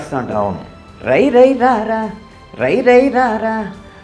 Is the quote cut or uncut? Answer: uncut